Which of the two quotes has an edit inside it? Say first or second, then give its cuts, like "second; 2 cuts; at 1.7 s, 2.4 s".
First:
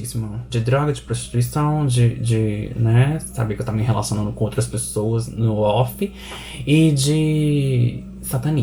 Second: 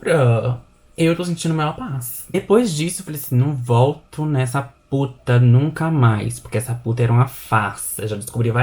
second; 1 cut; at 2.3 s